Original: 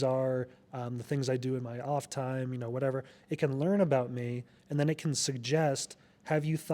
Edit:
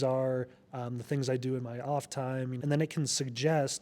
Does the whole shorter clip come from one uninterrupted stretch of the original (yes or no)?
no